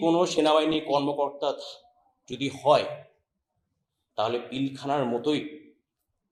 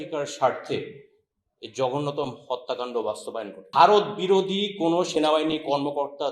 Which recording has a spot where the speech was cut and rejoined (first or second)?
second